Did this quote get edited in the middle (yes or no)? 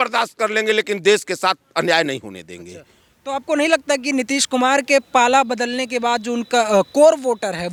no